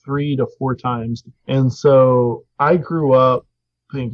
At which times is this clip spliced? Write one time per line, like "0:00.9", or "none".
0:01.3